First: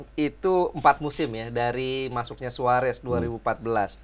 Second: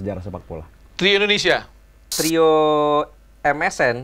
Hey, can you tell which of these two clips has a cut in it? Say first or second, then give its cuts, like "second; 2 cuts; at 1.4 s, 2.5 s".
second; 1 cut; at 2.2 s